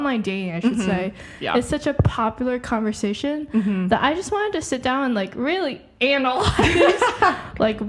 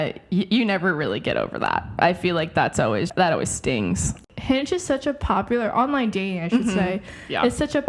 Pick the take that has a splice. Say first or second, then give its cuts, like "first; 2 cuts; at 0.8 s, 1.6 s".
second; 2 cuts; at 3.1 s, 4.2 s